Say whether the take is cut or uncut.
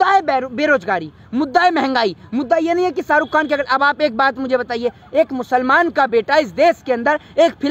uncut